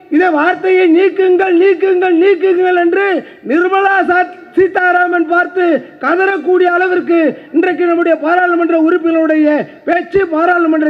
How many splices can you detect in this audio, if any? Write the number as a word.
zero